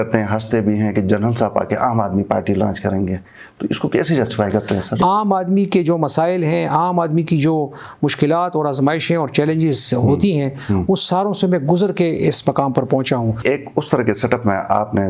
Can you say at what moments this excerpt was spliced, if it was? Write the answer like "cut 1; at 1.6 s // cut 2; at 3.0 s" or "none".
cut 1; at 5.0 s // cut 2; at 13.4 s